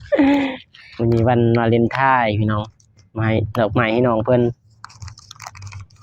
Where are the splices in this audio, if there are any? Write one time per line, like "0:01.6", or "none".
none